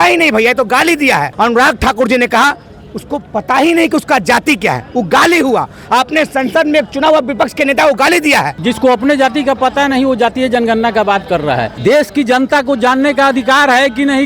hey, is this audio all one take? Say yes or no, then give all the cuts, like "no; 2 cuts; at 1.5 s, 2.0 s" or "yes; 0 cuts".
no; 3 cuts; at 1.3 s, 8.5 s, 11.7 s